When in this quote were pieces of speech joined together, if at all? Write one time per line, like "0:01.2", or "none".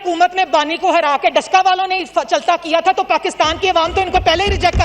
none